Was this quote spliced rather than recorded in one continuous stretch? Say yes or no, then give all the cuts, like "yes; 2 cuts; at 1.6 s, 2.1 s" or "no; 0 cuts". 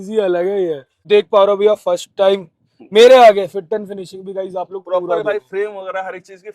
yes; 1 cut; at 1.0 s